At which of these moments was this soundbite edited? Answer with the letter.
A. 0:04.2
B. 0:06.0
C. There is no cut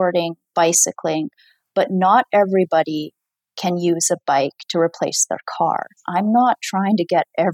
B